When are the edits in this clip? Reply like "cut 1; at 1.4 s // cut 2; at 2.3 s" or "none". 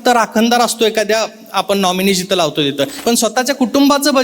cut 1; at 2.9 s